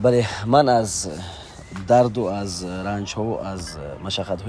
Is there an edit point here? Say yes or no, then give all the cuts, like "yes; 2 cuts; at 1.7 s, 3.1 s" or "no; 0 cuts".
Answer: no; 0 cuts